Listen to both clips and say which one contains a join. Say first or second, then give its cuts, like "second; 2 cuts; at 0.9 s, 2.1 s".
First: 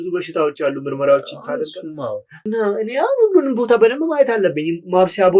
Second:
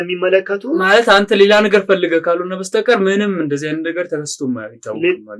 first; 1 cut; at 2.3 s